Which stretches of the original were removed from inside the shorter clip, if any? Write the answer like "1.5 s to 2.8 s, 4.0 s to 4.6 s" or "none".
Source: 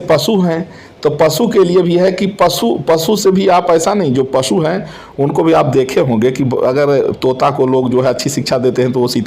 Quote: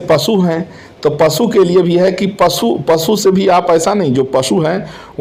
none